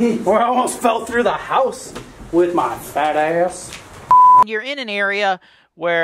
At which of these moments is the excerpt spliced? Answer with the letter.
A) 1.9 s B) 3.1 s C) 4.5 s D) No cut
C